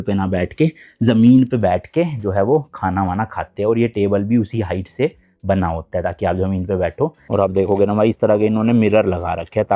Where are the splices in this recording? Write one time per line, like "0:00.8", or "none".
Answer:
0:07.2